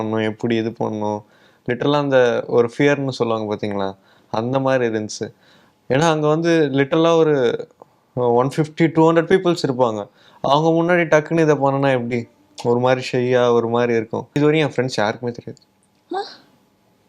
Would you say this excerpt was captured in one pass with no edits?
no; 1 cut; at 14.4 s

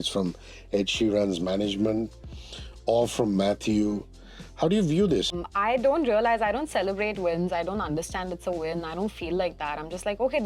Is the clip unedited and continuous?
no; 1 cut; at 5.3 s

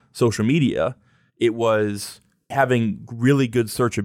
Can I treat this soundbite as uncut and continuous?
no; 1 cut; at 2.5 s

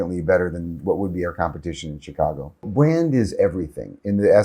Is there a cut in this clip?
yes; 1 cut; at 2.7 s

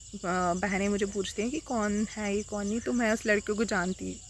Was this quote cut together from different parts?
no; 0 cuts

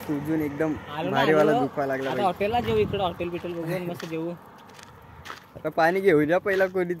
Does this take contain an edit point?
no; 0 cuts

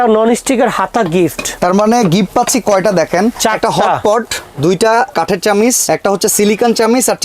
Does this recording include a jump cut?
yes; 3 cuts; at 1.5 s, 3.4 s, 5.4 s

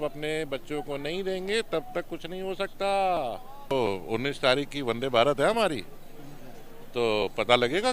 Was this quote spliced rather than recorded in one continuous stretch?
yes; 1 cut; at 3.7 s

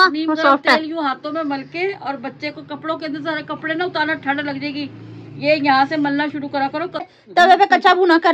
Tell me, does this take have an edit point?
yes; 1 cut; at 7.2 s

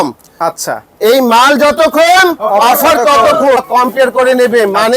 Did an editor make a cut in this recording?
yes; 1 cut; at 3.6 s

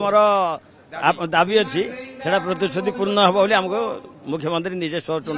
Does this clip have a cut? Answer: no; 0 cuts

